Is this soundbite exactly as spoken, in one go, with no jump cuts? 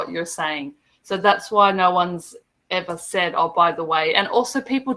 yes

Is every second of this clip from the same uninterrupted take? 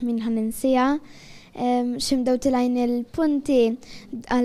no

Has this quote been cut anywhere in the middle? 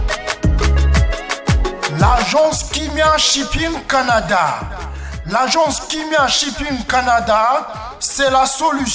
yes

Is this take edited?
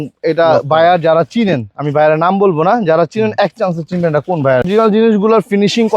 yes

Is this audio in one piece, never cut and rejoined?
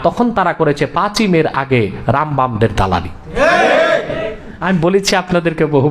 no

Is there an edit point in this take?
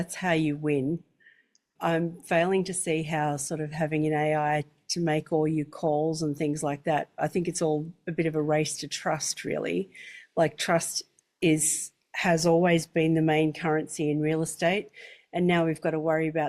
yes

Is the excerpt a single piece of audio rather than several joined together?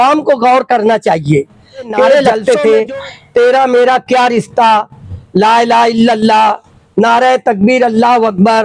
no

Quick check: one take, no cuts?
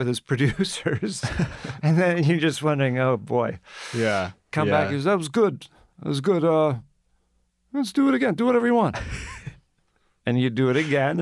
no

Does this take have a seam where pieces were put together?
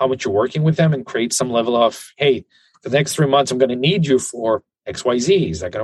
no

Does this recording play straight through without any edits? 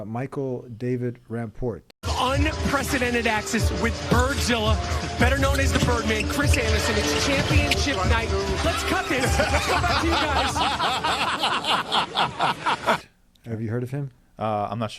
yes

